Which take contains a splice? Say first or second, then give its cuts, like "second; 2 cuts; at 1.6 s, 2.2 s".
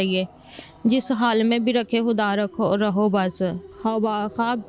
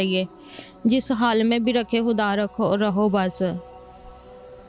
first; 1 cut; at 3.7 s